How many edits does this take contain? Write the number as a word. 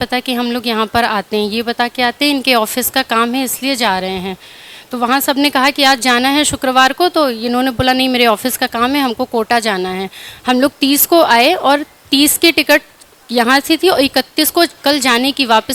zero